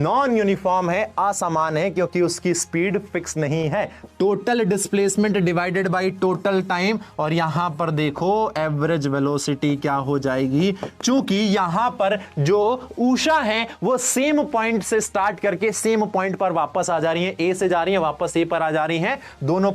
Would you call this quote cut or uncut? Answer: cut